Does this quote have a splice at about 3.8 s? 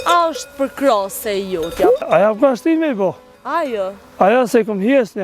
no; 1 cut; at 2.0 s

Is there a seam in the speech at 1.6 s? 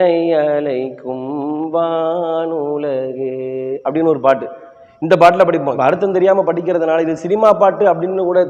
no; 1 cut; at 5.8 s

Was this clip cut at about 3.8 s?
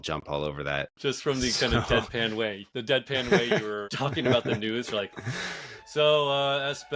yes; 3 cuts; at 0.9 s, 2.7 s, 3.8 s

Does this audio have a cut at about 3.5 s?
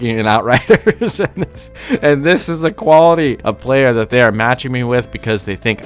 yes; 1 cut; at 3.5 s

